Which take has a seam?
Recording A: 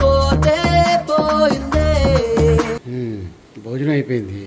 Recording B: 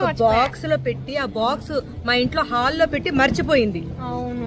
A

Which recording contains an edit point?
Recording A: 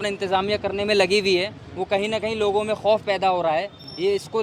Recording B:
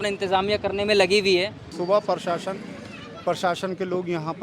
B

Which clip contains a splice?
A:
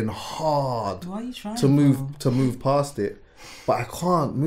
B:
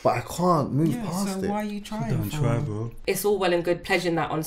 B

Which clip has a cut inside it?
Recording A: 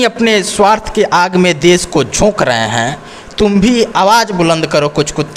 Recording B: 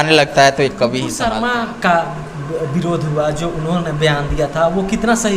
B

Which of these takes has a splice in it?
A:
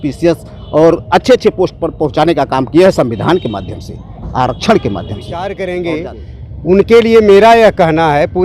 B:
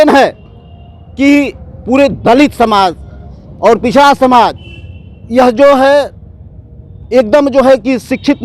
A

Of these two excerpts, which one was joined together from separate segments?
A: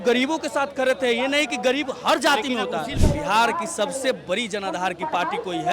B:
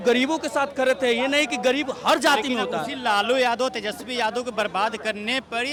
A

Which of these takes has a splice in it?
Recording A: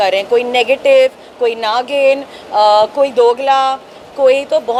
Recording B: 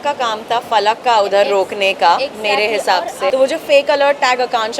B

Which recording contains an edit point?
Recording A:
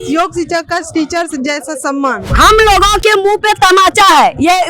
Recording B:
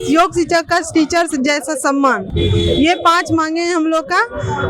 A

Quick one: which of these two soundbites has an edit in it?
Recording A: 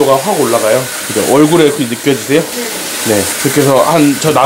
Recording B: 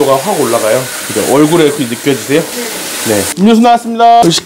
B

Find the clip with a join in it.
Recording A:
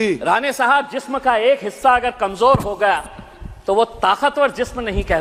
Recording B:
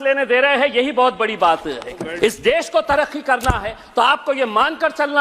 B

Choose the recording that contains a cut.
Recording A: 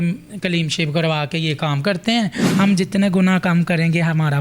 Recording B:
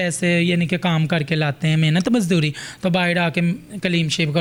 A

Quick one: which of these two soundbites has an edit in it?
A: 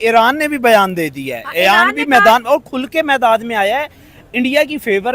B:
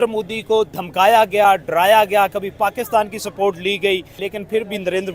B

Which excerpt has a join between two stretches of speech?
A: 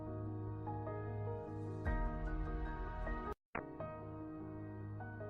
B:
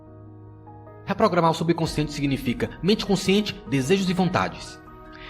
B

